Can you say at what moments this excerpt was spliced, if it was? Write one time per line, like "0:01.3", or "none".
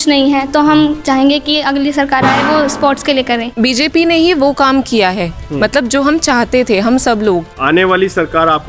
0:03.5
0:07.5